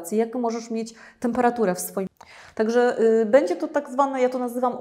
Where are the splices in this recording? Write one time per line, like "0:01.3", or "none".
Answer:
0:02.1